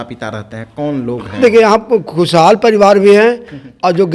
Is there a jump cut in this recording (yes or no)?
no